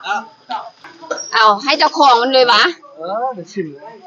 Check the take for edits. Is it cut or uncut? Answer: uncut